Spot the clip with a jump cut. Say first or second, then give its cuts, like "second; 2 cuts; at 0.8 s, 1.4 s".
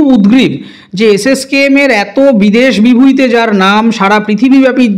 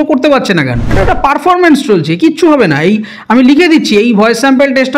second; 1 cut; at 1.0 s